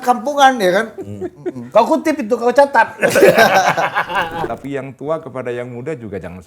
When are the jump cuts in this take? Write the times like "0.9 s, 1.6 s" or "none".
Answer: 4.5 s